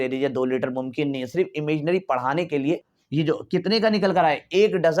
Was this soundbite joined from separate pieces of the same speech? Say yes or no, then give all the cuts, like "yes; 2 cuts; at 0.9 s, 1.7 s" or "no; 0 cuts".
yes; 1 cut; at 2.9 s